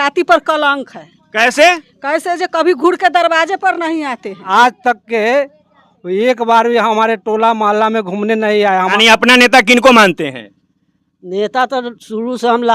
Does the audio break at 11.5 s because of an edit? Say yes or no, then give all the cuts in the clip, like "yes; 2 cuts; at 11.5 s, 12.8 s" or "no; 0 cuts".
no; 2 cuts; at 4.4 s, 8.9 s